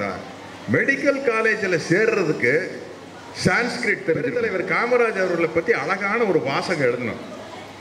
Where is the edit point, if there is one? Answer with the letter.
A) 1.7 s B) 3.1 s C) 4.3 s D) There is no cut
C